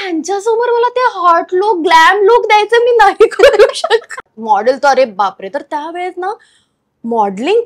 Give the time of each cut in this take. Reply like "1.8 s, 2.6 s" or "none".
4.2 s